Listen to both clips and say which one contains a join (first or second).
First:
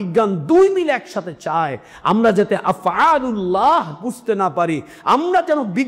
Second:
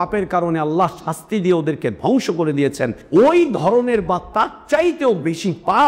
second